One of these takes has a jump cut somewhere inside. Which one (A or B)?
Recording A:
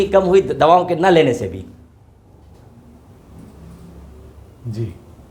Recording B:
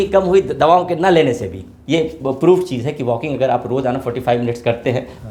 B